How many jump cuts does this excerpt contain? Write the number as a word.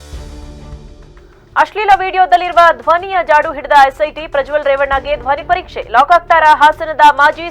one